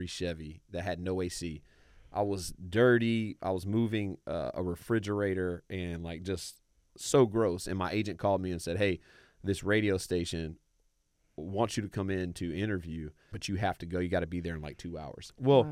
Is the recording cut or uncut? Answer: cut